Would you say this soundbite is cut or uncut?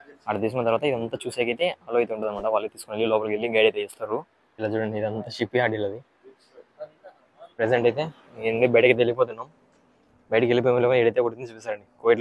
uncut